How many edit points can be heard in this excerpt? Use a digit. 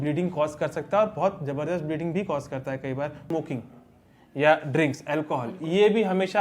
1